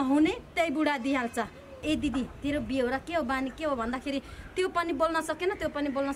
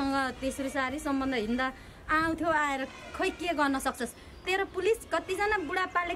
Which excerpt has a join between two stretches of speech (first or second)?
first